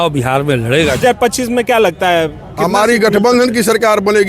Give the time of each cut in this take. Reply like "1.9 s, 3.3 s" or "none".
1.0 s